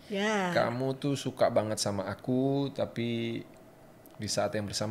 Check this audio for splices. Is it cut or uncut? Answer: uncut